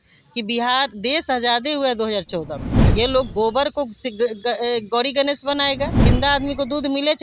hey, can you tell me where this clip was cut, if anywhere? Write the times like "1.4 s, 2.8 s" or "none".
2.8 s, 6.1 s